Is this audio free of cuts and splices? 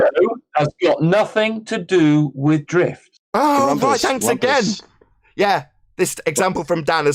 yes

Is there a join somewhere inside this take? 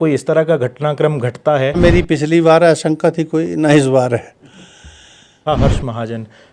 yes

